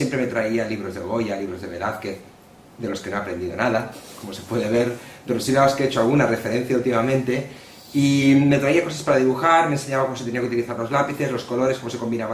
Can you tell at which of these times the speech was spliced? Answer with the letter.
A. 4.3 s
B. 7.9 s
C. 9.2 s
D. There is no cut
D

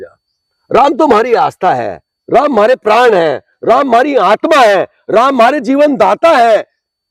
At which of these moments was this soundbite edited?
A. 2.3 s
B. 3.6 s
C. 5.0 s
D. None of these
D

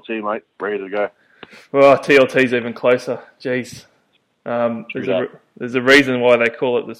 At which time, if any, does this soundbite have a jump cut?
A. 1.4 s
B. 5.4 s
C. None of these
C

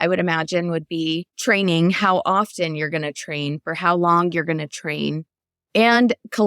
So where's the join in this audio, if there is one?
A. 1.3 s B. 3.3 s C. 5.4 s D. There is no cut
A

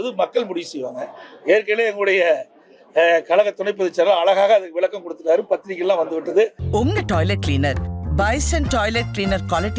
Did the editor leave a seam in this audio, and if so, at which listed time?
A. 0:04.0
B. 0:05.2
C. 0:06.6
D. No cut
C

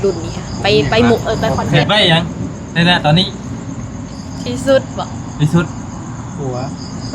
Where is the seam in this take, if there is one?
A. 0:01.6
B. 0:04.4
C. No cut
A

